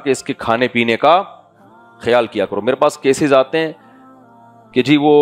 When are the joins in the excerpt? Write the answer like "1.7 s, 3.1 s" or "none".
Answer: none

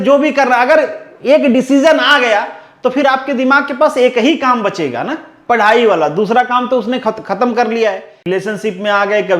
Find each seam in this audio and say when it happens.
8.2 s

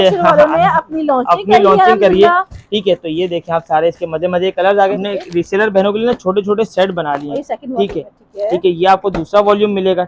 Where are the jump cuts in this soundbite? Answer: 5.0 s

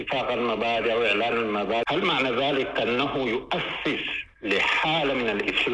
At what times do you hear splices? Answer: 1.8 s

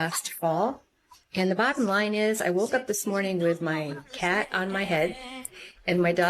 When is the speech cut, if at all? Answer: none

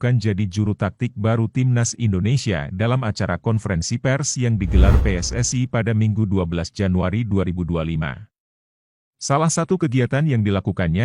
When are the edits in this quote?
7.8 s

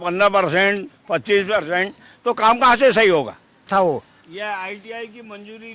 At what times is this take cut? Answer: 3.6 s

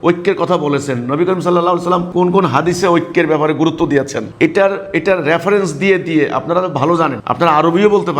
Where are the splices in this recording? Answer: none

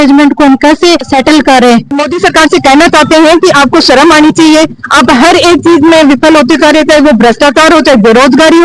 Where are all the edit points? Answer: 2.0 s

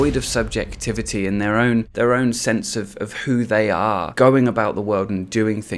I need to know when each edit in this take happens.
1.9 s, 4.1 s

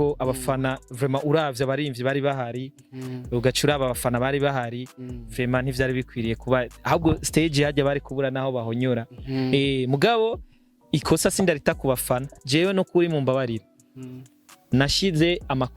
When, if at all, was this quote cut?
12.4 s

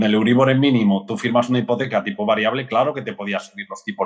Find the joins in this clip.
none

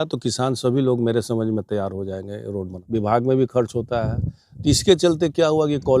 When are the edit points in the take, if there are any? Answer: 2.8 s

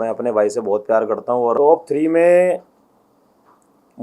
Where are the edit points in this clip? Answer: 1.6 s

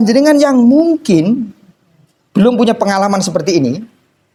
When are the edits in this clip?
none

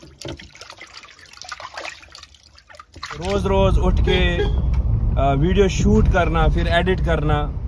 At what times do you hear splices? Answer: 3.2 s

